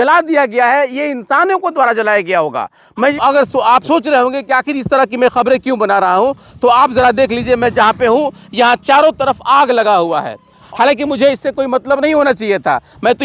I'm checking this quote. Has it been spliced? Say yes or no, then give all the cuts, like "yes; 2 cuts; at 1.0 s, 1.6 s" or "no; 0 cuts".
yes; 2 cuts; at 3.1 s, 10.6 s